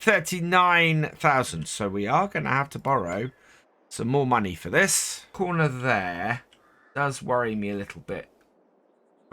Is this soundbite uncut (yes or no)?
no